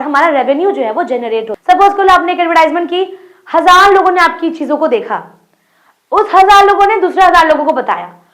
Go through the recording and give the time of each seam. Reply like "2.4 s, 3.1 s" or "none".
1.5 s